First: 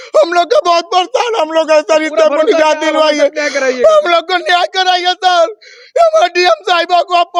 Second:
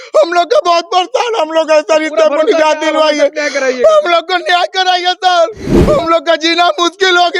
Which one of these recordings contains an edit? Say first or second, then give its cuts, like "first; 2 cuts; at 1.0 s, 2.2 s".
second; 1 cut; at 5.7 s